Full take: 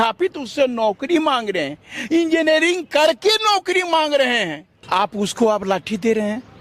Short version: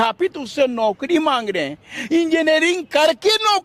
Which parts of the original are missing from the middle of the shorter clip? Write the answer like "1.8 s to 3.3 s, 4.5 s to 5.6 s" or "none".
none